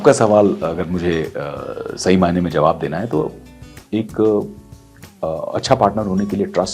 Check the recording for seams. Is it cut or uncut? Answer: uncut